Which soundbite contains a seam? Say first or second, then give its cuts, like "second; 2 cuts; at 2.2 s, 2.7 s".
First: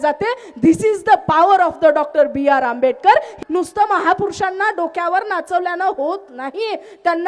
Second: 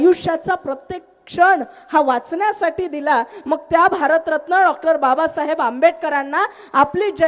first; 1 cut; at 3.3 s